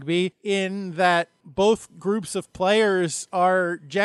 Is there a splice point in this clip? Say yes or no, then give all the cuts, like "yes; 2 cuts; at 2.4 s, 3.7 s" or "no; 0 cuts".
yes; 1 cut; at 1.4 s